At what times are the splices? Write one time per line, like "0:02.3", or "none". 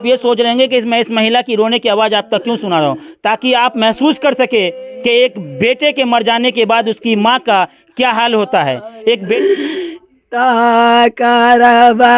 0:04.7
0:08.9